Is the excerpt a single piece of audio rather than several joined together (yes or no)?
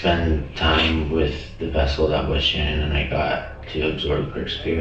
yes